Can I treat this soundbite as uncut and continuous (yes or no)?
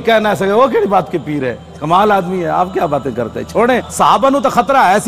no